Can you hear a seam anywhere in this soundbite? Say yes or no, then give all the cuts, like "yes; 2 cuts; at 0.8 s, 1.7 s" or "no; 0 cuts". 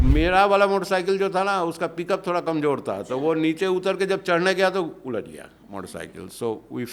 no; 0 cuts